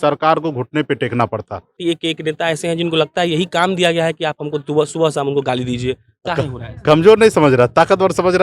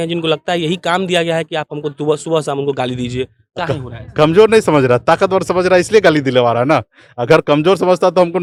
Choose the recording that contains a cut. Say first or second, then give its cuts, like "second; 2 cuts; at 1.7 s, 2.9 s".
first; 1 cut; at 1.8 s